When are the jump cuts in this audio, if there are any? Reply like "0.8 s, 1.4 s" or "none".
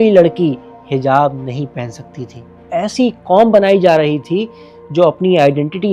2.7 s

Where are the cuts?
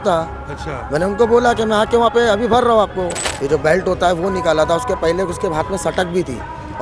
3.2 s

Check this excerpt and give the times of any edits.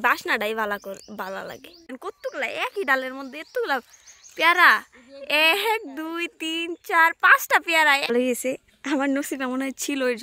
2.0 s, 8.1 s

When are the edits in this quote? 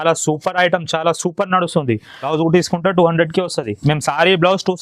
2.3 s

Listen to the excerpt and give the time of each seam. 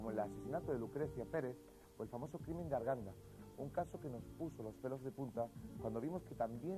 3.9 s

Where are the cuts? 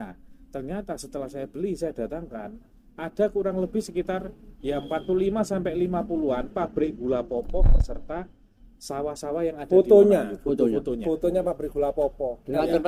none

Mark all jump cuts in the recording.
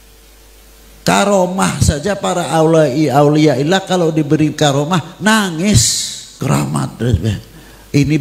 6.4 s

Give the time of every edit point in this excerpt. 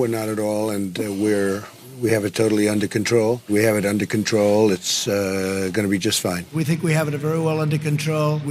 none

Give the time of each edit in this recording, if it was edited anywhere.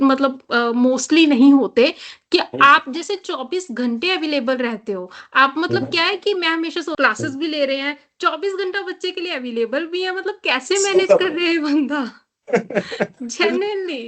6.9 s

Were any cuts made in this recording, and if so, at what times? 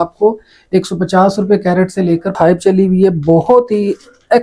2.3 s

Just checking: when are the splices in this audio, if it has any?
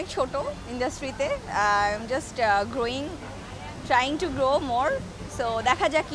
none

